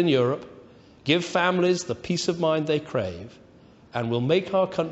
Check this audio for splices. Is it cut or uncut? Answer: uncut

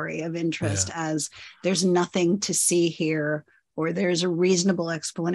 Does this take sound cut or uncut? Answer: uncut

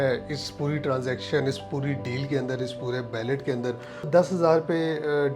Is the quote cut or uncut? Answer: cut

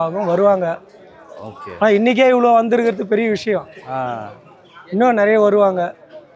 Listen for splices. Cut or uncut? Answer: uncut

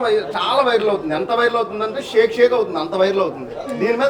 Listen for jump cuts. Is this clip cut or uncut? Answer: uncut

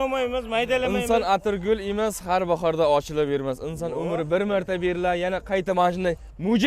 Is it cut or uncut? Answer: cut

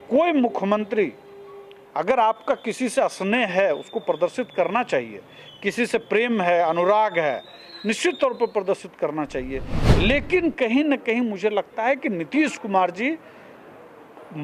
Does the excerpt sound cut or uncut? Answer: uncut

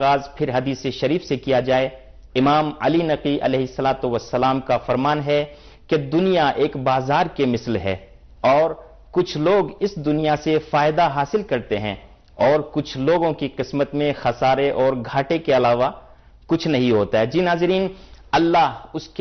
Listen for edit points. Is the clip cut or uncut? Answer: cut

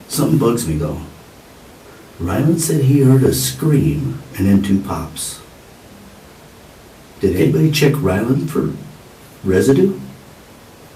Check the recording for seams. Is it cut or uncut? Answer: uncut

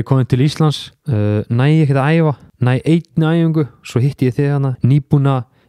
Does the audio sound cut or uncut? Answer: cut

